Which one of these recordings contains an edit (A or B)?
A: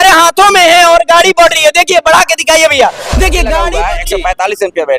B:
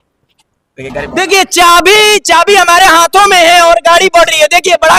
A